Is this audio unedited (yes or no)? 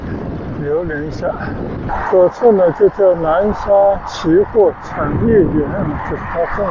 no